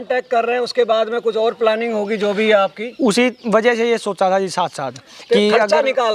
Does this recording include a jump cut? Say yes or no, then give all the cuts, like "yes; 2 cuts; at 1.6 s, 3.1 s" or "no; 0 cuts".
no; 0 cuts